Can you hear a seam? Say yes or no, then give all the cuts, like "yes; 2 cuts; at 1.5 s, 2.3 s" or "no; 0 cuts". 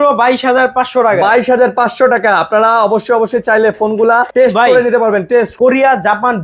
yes; 2 cuts; at 4.3 s, 5.5 s